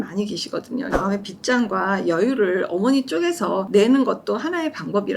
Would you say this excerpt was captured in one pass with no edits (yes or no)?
no